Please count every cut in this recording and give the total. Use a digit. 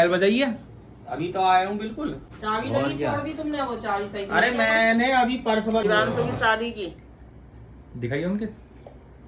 2